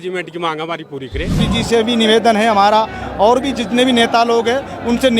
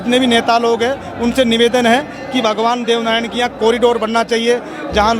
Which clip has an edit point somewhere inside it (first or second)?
first